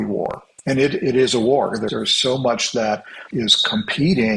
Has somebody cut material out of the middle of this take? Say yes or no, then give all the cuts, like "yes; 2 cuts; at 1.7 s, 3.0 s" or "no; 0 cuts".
yes; 2 cuts; at 1.9 s, 3.2 s